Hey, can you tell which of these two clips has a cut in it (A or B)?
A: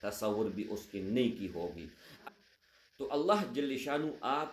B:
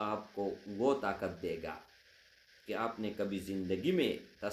A